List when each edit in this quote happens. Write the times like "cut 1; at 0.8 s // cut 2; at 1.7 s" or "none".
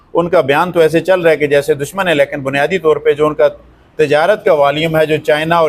none